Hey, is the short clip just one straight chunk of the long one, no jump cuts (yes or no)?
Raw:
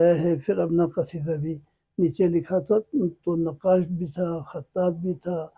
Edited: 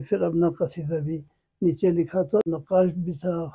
no